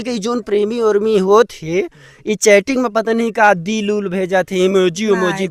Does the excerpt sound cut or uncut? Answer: uncut